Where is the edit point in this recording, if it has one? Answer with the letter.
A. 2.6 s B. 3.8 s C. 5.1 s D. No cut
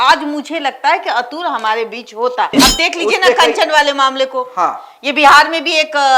A